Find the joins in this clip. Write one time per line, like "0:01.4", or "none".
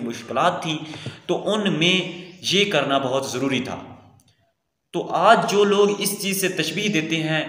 none